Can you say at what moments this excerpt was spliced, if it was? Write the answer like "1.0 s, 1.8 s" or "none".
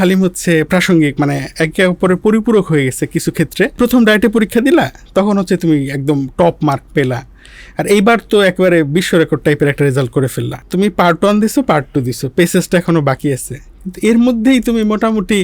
3.8 s, 10.6 s